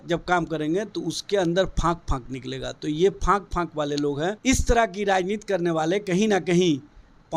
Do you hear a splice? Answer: yes; 1 cut; at 4.4 s

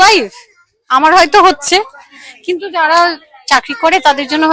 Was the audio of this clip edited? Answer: no; 0 cuts

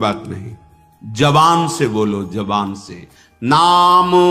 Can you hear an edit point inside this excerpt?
no; 0 cuts

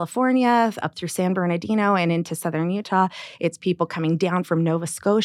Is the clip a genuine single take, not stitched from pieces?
yes; 0 cuts

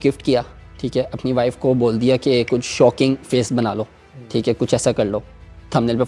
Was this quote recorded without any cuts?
yes; 0 cuts

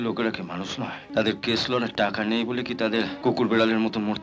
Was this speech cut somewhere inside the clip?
yes; 2 cuts; at 1.0 s, 3.1 s

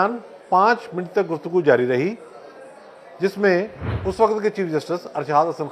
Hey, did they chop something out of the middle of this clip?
yes; 1 cut; at 3.8 s

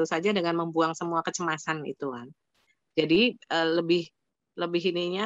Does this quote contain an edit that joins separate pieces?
no; 0 cuts

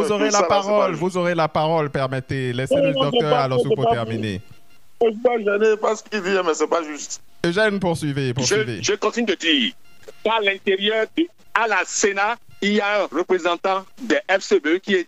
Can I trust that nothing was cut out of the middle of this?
yes; 0 cuts

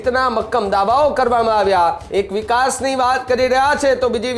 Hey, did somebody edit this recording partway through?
yes; 1 cut; at 2.0 s

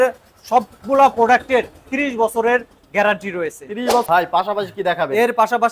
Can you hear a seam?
yes; 1 cut; at 4.1 s

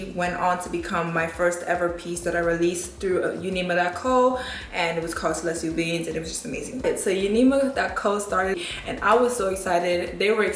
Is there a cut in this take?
no; 0 cuts

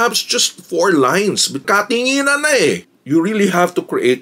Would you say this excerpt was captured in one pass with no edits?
no; 2 cuts; at 1.6 s, 2.9 s

